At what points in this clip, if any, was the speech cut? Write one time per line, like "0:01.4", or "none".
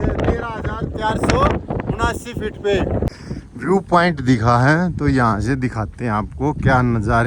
0:03.1